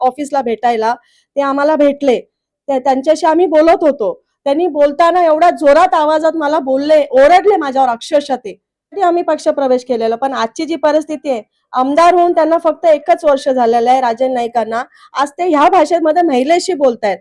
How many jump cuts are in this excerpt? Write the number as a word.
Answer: one